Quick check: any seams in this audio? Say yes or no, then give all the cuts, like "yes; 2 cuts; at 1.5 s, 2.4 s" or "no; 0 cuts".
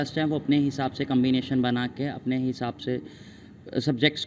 no; 0 cuts